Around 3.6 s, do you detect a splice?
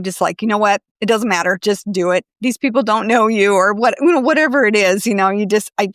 no; 2 cuts; at 0.9 s, 2.3 s

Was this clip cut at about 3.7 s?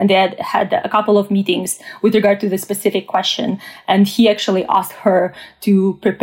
no; 0 cuts

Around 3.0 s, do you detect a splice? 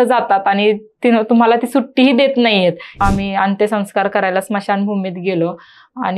yes; 1 cut; at 3.0 s

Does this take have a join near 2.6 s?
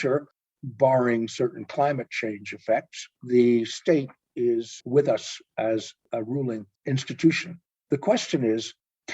no; 2 cuts; at 4.8 s, 6.4 s

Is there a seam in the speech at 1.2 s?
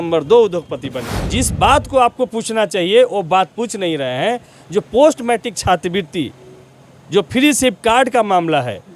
yes; 1 cut; at 1.2 s

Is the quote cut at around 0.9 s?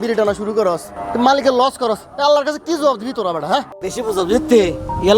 yes; 2 cuts; at 0.9 s, 3.7 s

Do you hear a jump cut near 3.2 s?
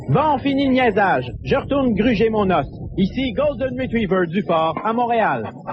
no; 0 cuts

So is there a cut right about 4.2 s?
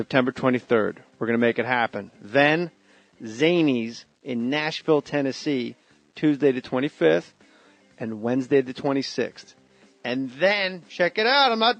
no; 0 cuts

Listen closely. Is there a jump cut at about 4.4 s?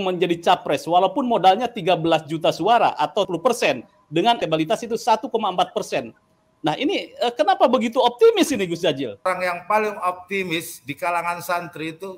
yes; 3 cuts; at 3.3 s, 4.4 s, 9.3 s

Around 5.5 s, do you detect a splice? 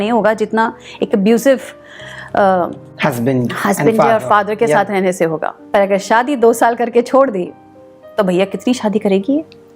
yes; 1 cut; at 5.5 s

